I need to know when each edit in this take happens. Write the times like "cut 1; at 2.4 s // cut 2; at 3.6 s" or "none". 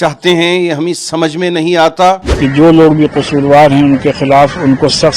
cut 1; at 2.3 s